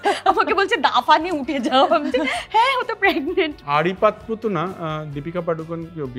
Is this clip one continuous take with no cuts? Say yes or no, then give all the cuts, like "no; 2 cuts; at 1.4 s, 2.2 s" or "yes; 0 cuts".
no; 1 cut; at 3.6 s